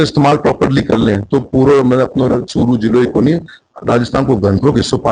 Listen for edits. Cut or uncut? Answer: uncut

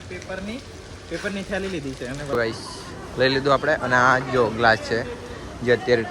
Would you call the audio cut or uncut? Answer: cut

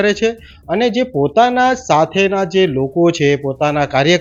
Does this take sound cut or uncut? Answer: uncut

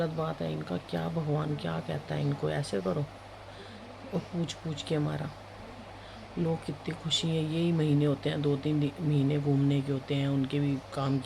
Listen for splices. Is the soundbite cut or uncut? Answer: uncut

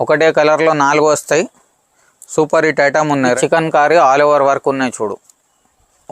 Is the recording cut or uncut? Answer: cut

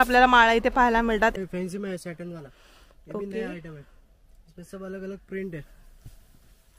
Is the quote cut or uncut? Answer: cut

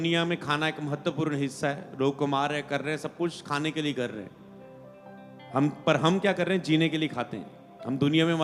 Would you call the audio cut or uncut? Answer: uncut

